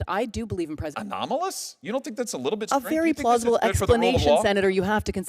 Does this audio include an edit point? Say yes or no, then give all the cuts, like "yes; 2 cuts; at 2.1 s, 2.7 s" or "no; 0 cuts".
yes; 1 cut; at 0.9 s